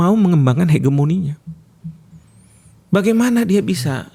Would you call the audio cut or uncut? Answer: uncut